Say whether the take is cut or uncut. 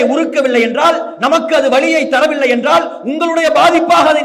uncut